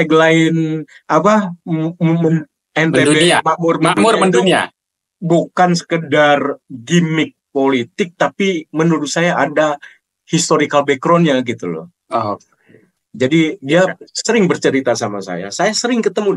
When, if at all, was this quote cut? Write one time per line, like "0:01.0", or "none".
none